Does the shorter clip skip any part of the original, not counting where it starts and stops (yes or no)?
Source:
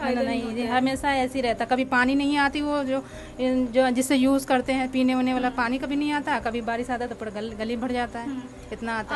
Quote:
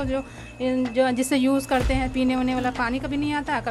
no